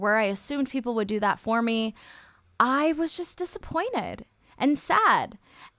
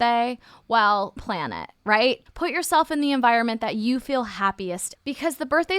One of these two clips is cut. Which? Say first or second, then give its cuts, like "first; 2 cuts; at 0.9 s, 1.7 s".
second; 2 cuts; at 2.3 s, 4.9 s